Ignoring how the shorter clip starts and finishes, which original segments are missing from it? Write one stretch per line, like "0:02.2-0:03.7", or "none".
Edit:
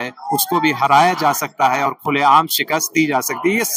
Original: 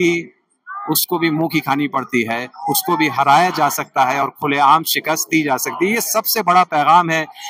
none